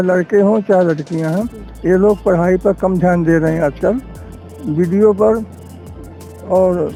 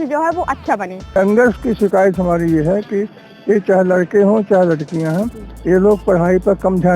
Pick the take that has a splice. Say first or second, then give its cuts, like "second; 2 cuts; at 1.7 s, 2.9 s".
second; 1 cut; at 1.2 s